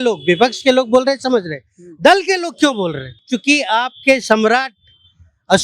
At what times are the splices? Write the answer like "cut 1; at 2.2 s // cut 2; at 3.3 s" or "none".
cut 1; at 3.2 s